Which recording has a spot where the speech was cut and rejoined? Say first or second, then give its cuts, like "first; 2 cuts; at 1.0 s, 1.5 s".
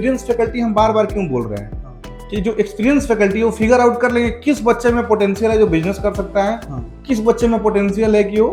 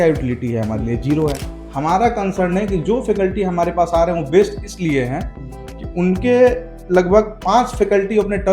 second; 1 cut; at 1.5 s